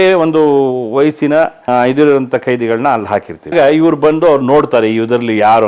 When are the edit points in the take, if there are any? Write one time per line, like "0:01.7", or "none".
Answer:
0:01.6
0:03.5